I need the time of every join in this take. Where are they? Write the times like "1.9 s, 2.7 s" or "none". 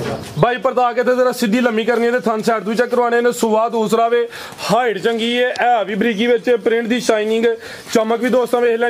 none